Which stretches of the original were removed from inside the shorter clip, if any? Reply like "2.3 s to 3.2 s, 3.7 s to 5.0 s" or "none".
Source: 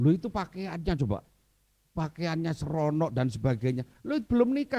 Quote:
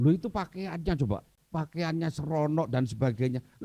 1.4 s to 1.8 s